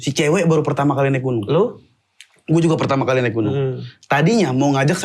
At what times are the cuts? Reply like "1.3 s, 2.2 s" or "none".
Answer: none